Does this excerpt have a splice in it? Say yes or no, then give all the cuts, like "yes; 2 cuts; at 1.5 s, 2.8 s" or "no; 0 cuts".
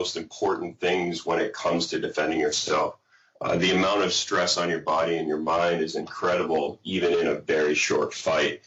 no; 0 cuts